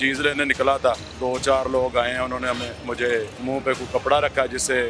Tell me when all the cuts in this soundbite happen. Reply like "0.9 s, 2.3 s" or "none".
1.1 s, 3.3 s